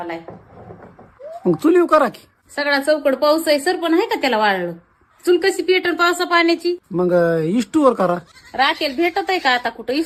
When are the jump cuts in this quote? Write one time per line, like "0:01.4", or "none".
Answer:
none